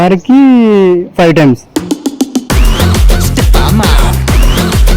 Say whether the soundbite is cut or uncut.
cut